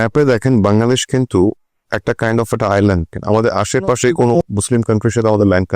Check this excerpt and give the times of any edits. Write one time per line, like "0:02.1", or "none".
0:03.1
0:04.4